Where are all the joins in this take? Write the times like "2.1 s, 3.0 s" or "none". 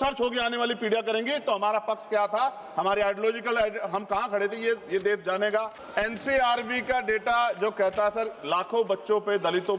5.8 s